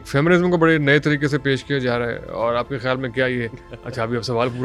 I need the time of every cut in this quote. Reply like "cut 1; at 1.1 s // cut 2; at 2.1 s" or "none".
none